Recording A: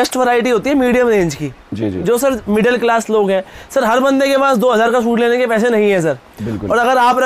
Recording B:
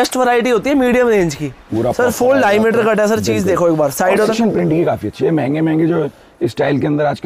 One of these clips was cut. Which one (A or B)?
B